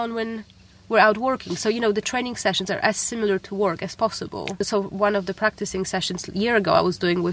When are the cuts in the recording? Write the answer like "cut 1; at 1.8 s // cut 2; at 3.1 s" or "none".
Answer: cut 1; at 4.6 s